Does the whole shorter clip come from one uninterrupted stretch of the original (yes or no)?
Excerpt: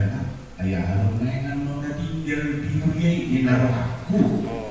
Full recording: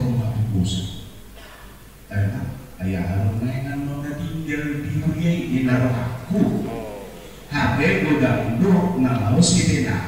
yes